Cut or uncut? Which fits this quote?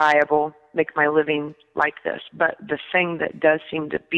uncut